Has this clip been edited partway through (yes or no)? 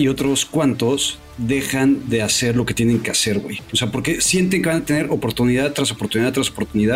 no